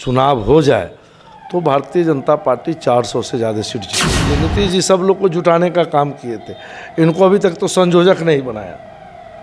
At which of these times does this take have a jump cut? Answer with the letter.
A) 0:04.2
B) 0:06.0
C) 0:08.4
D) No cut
A